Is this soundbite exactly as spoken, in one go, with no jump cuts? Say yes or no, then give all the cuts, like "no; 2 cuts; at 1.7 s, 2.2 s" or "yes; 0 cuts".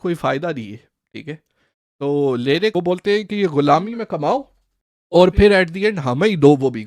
no; 1 cut; at 2.7 s